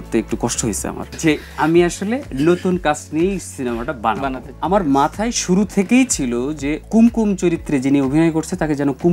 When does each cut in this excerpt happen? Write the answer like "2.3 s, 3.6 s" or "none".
1.1 s, 4.5 s, 6.8 s